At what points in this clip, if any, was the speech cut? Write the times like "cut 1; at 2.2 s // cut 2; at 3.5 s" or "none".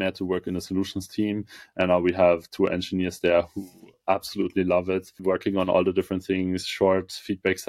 cut 1; at 5.1 s

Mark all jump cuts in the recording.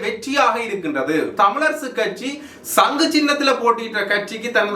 cut 1; at 1.3 s

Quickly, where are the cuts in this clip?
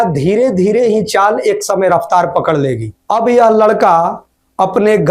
none

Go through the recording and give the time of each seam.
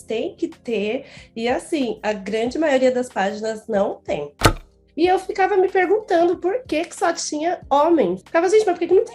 cut 1; at 4.5 s // cut 2; at 8.2 s

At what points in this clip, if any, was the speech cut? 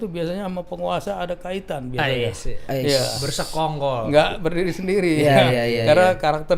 none

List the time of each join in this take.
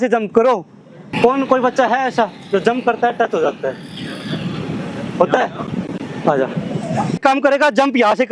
cut 1; at 1.1 s // cut 2; at 7.2 s

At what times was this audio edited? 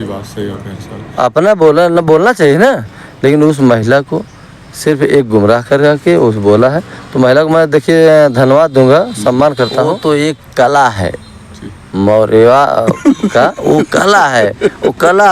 cut 1; at 10.0 s

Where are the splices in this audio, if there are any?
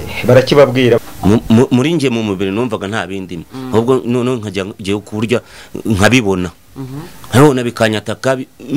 cut 1; at 1.0 s

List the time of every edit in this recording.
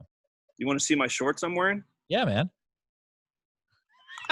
none

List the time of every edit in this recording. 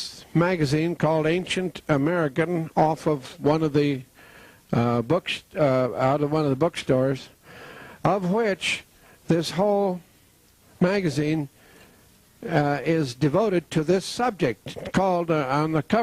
none

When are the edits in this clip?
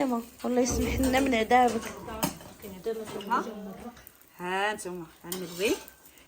cut 1; at 3.3 s

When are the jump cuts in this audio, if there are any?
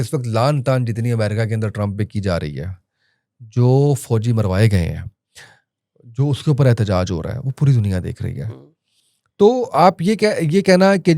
none

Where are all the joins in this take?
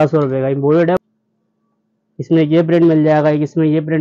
cut 1; at 1.0 s

